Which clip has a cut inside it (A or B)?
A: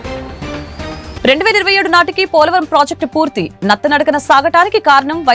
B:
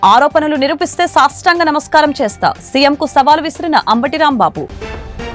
A